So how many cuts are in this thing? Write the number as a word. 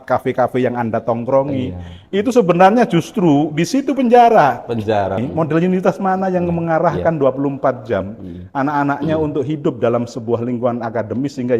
one